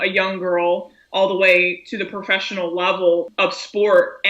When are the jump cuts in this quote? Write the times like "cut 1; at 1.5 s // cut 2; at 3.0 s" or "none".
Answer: none